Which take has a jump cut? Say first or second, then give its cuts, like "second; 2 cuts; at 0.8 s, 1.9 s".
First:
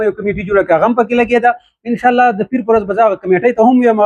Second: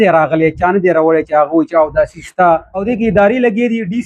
second; 1 cut; at 2.7 s